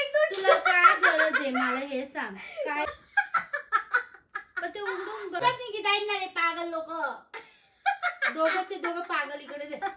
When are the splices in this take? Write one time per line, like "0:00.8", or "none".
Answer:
0:02.9
0:05.4